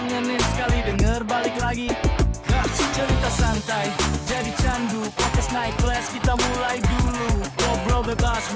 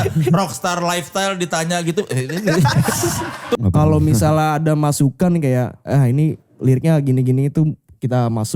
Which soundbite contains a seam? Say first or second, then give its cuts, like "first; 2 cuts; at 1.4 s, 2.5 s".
second; 1 cut; at 3.6 s